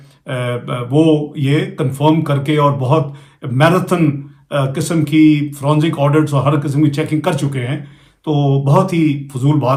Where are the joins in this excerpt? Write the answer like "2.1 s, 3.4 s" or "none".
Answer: none